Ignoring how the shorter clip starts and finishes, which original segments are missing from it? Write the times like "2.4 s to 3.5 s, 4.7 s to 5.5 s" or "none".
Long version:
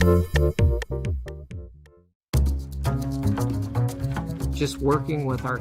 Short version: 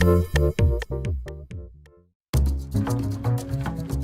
2.7 s to 3.2 s